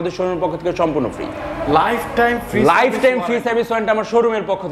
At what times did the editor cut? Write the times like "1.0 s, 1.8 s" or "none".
none